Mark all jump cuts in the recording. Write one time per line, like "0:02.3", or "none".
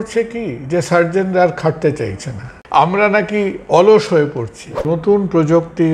0:02.5
0:04.8